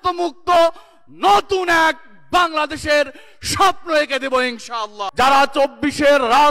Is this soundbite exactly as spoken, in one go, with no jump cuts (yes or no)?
no